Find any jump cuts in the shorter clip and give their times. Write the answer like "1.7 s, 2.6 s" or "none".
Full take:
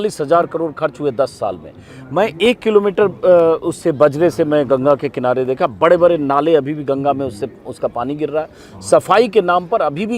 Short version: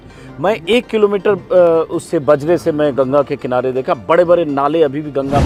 none